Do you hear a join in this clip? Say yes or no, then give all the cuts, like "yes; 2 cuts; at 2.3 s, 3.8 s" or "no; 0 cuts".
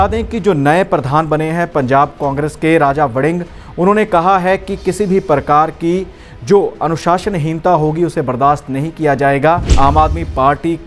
yes; 1 cut; at 9.8 s